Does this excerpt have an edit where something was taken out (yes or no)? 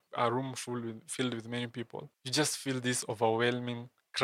no